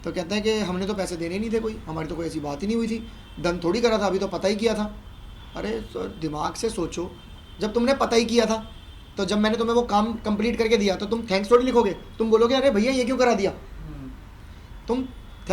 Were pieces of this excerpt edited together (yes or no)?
no